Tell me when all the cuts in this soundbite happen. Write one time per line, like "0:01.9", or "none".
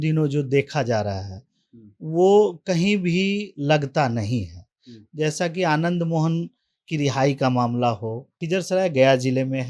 0:08.4